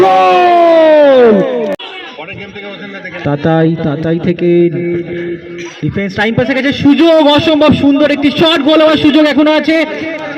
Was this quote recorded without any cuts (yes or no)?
no